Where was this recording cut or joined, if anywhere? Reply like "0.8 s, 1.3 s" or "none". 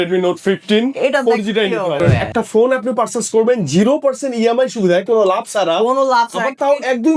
2.0 s